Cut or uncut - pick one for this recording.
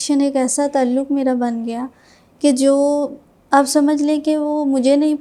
uncut